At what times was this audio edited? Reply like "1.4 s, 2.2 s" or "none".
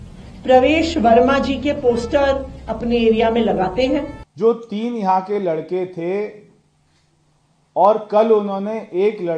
4.2 s